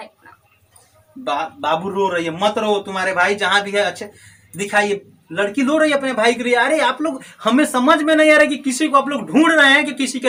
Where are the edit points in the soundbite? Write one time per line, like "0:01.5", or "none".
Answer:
none